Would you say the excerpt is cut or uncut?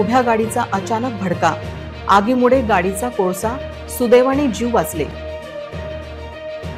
uncut